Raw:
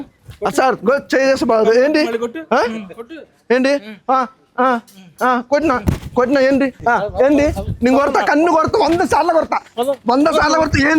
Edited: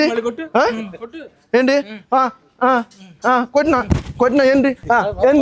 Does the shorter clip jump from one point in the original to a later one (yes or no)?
no